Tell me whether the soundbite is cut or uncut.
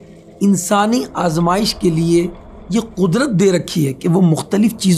uncut